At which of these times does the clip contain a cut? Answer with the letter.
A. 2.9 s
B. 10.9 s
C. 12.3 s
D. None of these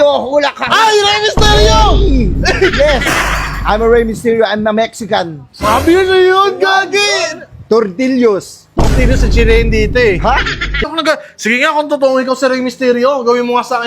B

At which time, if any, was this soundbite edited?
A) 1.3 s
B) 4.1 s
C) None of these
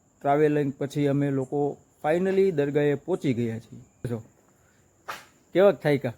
B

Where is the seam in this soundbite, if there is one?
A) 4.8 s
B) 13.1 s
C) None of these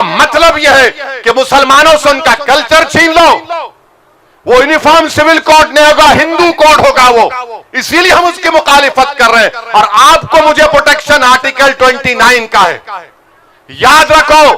C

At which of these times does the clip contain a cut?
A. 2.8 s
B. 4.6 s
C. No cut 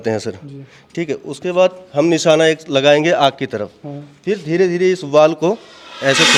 C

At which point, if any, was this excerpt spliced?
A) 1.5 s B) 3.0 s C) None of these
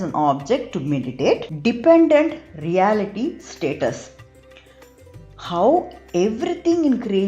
A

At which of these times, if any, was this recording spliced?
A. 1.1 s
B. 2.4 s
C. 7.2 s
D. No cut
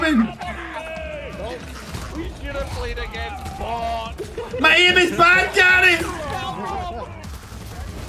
C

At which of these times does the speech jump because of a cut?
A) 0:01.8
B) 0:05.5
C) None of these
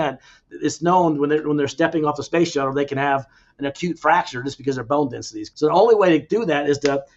B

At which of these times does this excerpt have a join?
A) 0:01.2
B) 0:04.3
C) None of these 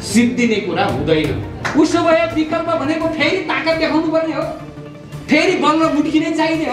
C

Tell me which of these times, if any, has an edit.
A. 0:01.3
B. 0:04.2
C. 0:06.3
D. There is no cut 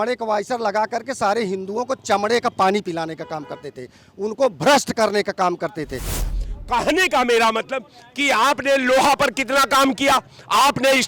C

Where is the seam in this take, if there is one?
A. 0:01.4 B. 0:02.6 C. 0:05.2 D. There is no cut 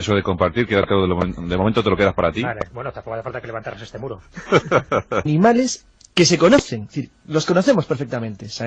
D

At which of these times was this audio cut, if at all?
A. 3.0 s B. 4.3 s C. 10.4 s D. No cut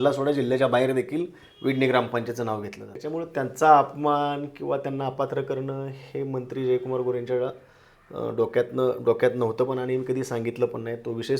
A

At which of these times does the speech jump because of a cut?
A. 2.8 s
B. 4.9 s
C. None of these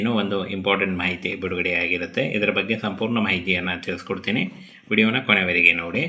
C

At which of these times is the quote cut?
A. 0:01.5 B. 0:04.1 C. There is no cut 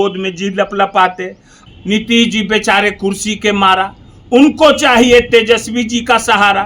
A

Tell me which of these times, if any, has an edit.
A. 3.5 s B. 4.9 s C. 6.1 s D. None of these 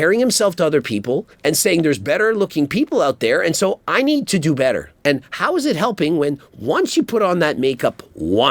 D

